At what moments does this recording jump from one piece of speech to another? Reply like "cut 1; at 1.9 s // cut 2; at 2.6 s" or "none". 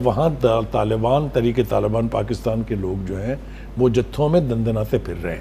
none